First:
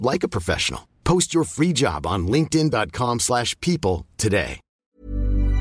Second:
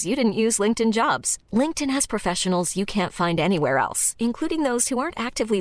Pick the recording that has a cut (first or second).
first